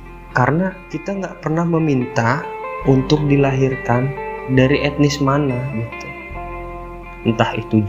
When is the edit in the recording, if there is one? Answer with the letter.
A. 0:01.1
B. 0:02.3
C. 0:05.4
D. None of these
A